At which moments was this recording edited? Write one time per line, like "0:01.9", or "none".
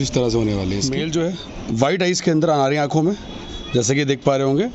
0:00.9